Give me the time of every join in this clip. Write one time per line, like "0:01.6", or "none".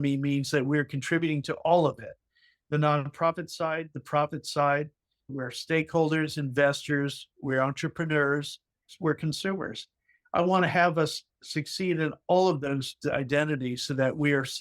0:05.3
0:08.9